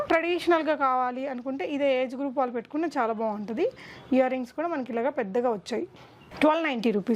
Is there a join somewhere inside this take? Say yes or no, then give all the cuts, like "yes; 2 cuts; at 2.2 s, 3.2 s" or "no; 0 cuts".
no; 0 cuts